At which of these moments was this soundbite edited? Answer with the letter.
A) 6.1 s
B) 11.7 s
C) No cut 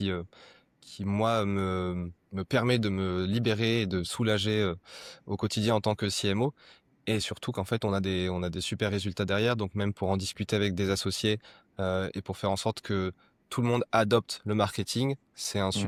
C